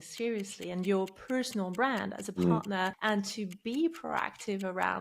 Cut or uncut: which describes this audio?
cut